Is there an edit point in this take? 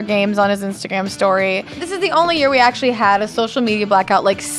yes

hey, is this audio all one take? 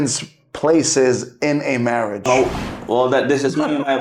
no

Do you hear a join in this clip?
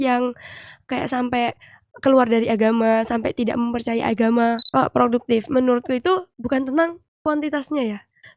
yes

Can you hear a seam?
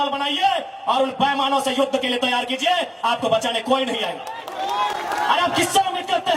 no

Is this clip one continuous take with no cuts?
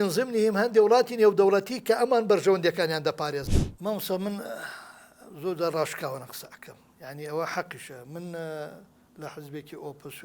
no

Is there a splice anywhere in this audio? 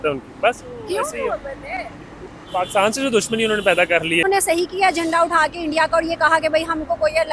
yes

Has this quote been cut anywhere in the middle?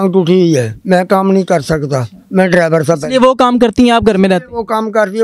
no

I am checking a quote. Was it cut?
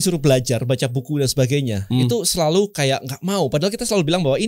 no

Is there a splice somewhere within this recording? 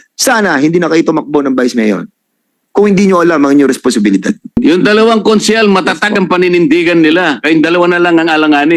yes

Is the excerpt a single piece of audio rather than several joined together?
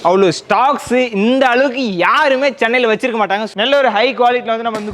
no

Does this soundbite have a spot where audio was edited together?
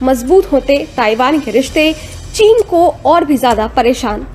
no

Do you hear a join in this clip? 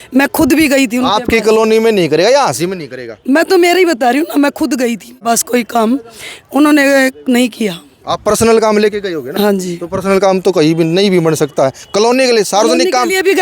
no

